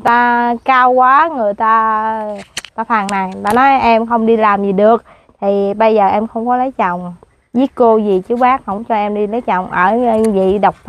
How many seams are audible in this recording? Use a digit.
0